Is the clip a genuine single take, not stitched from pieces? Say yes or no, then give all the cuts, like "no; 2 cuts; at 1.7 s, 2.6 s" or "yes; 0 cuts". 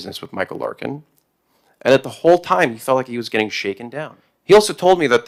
yes; 0 cuts